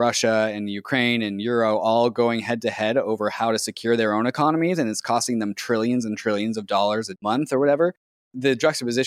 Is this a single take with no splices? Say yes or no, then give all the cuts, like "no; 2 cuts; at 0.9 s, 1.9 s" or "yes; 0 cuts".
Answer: no; 2 cuts; at 7.2 s, 8.3 s